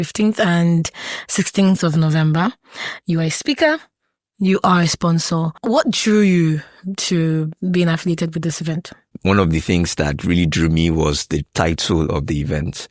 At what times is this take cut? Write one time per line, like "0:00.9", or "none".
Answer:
0:05.5
0:09.0